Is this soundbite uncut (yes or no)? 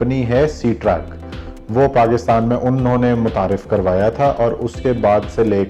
yes